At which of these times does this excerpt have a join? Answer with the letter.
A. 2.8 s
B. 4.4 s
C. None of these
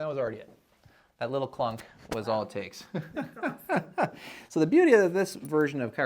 C